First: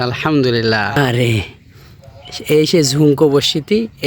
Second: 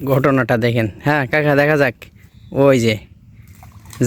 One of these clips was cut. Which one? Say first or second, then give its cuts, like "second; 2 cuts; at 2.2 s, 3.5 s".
first; 1 cut; at 1.0 s